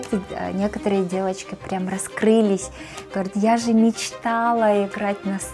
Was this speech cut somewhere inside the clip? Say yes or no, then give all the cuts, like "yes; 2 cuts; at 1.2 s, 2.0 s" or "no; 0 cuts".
no; 0 cuts